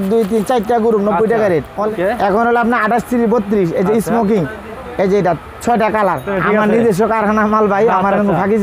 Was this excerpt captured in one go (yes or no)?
no